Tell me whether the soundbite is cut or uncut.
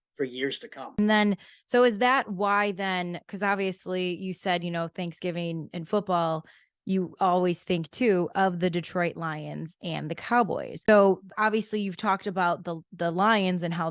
cut